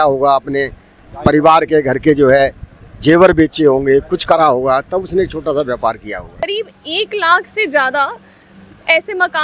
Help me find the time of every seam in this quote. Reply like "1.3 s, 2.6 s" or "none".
6.4 s